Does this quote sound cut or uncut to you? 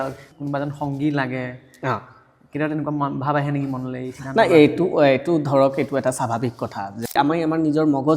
cut